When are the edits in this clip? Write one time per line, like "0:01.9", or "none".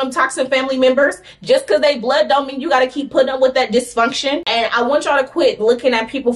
0:04.5